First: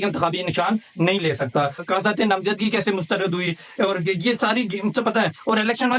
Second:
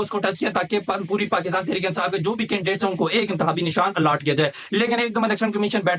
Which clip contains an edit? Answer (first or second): first